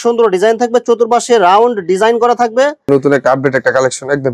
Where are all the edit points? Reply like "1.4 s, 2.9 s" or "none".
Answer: 2.9 s